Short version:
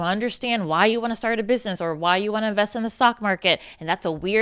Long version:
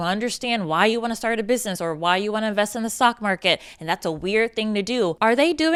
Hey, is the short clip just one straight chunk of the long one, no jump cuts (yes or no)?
yes